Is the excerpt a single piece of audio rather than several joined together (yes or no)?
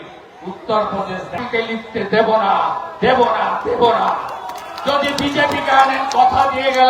no